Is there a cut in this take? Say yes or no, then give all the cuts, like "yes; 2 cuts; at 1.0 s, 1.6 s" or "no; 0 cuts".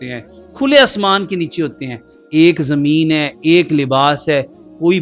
no; 0 cuts